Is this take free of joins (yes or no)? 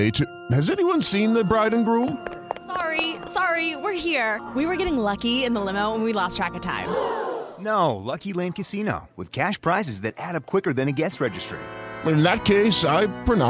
yes